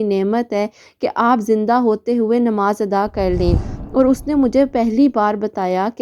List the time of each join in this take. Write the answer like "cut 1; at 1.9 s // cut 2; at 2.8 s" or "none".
cut 1; at 3.6 s